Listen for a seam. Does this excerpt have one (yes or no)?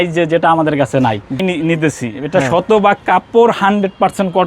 yes